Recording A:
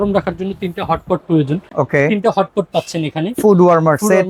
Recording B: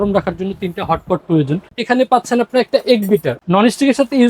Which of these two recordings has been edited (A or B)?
B